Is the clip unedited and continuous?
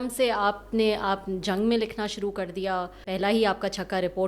no; 1 cut; at 3.1 s

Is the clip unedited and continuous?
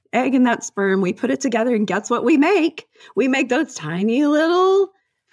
yes; 0 cuts

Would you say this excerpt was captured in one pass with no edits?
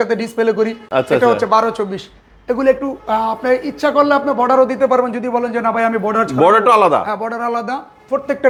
yes; 0 cuts

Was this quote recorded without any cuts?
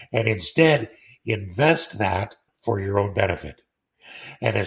yes; 0 cuts

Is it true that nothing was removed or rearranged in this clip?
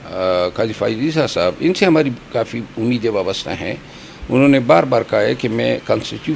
yes; 0 cuts

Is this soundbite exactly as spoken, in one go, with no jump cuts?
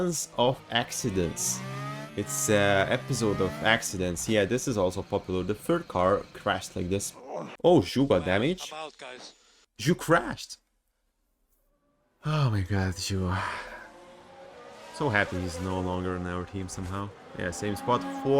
no; 1 cut; at 7.5 s

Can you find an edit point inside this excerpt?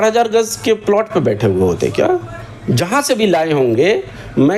no; 0 cuts

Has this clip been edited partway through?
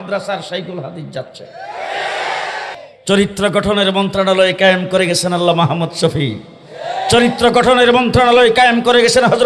yes; 1 cut; at 2.7 s

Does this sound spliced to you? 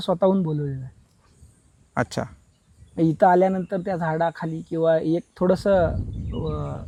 no; 0 cuts

